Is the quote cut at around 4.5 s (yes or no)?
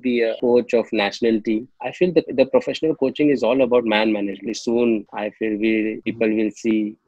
yes